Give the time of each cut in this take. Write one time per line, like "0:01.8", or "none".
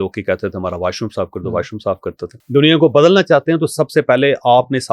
0:02.3